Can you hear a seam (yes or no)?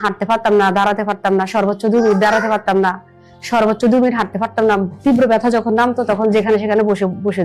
no